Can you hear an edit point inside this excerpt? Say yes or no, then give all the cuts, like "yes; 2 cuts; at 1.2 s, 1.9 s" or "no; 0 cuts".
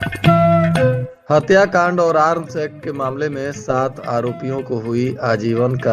yes; 1 cut; at 1.1 s